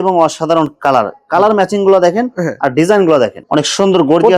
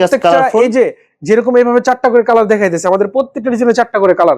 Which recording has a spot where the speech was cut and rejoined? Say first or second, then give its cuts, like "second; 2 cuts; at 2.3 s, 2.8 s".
first; 1 cut; at 3.4 s